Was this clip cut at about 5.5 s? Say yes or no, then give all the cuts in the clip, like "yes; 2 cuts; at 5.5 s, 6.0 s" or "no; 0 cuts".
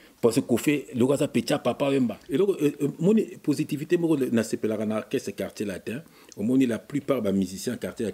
no; 1 cut; at 2.2 s